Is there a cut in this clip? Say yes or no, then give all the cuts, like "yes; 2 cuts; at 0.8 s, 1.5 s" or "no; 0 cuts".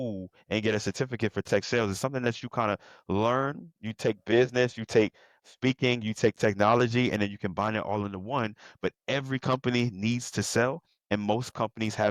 no; 0 cuts